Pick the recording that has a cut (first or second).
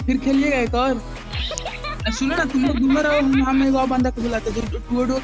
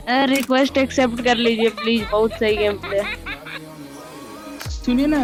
first